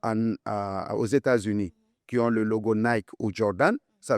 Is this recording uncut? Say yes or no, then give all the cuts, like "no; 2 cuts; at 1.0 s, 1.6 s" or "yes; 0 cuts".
yes; 0 cuts